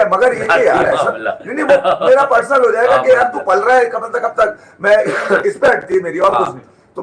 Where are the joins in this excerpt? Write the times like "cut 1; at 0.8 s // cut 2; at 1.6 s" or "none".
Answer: none